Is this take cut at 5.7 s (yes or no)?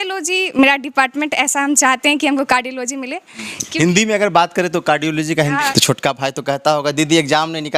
yes